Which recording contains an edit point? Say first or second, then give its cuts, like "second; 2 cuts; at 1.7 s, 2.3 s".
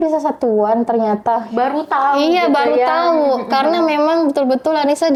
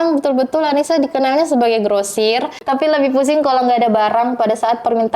second; 1 cut; at 2.6 s